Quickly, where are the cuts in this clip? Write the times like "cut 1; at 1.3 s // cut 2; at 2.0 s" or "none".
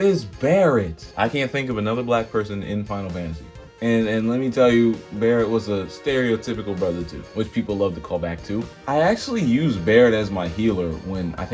cut 1; at 1.0 s // cut 2; at 7.2 s